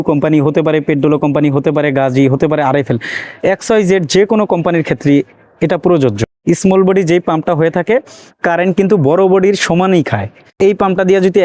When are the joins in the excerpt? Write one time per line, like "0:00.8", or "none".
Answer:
0:10.5